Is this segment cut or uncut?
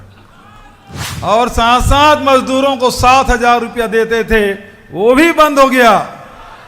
cut